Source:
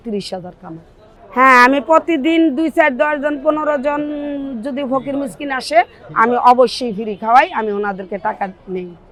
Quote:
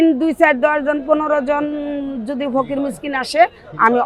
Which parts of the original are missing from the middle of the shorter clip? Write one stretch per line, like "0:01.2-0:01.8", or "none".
none